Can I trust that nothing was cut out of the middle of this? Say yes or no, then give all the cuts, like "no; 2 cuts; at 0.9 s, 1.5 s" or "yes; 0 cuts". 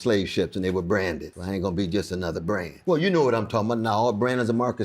no; 2 cuts; at 1.3 s, 2.7 s